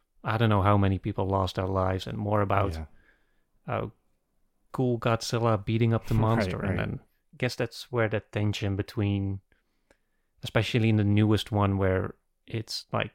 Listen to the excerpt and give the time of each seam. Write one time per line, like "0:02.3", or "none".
0:07.2